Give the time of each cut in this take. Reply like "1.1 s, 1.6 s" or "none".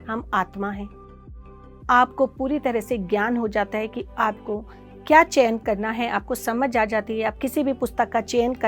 1.3 s, 7.4 s